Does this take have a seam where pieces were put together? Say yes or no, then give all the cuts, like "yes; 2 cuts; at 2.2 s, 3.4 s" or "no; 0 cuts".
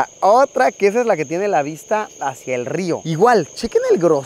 no; 0 cuts